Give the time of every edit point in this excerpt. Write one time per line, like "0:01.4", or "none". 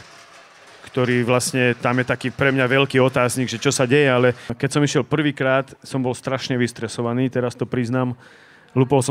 0:04.6